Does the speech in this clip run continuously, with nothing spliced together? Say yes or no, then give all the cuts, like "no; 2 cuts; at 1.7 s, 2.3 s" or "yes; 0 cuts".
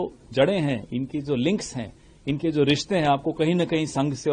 yes; 0 cuts